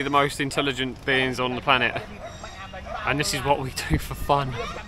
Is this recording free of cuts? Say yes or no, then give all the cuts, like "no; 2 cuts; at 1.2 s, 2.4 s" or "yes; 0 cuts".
yes; 0 cuts